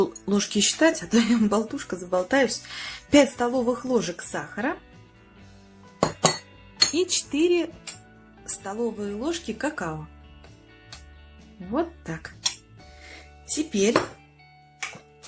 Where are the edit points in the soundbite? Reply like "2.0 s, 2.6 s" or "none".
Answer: none